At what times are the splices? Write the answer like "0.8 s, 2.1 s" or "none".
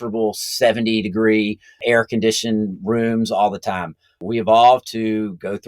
1.8 s